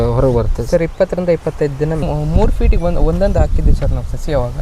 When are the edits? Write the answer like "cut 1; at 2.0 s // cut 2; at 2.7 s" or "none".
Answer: cut 1; at 2.0 s